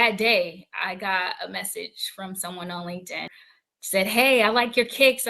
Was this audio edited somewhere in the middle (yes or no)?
yes